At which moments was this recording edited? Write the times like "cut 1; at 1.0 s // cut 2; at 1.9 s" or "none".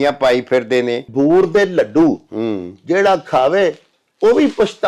cut 1; at 1.1 s